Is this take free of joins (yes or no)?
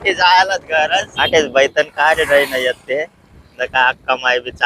no